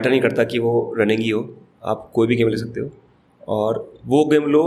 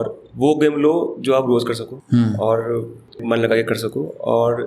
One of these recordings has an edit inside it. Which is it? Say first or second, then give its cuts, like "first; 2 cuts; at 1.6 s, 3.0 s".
second; 2 cuts; at 1.9 s, 3.2 s